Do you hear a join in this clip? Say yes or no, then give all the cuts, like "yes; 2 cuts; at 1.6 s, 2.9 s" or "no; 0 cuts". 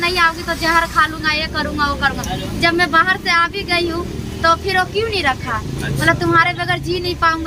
no; 0 cuts